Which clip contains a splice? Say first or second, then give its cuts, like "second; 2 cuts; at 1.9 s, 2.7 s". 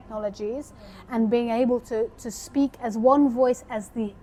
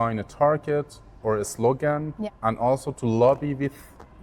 second; 1 cut; at 2.2 s